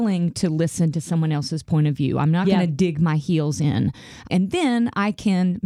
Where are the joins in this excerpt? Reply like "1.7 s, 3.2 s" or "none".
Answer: 4.3 s